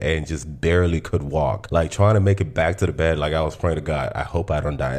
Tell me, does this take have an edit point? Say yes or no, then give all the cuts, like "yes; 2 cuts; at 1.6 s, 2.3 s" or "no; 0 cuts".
no; 0 cuts